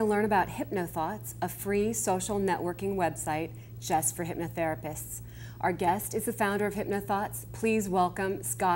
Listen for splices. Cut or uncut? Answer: uncut